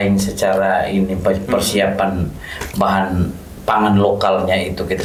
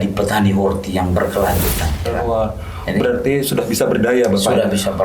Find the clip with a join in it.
second; 1 cut; at 2.1 s

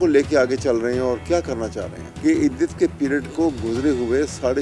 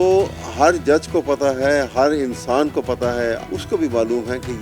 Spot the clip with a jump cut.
second; 1 cut; at 3.4 s

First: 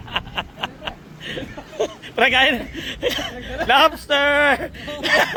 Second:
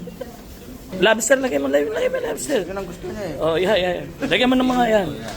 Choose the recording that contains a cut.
second; 1 cut; at 0.9 s

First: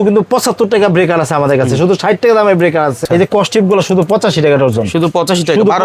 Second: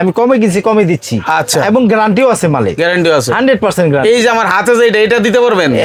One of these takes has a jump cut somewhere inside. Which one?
first; 1 cut; at 3.0 s

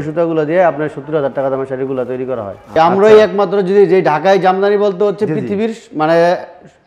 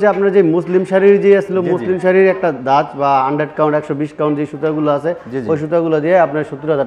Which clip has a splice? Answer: first; 1 cut; at 2.8 s

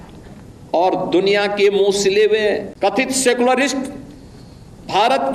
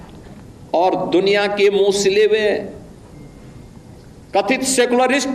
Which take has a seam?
first; 1 cut; at 2.7 s

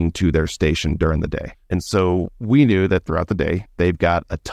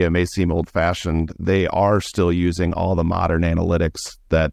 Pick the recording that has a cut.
first; 2 cuts; at 1.5 s, 3.7 s

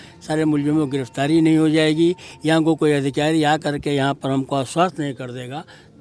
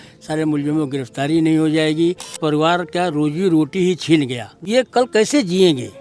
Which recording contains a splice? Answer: second; 2 cuts; at 2.4 s, 4.5 s

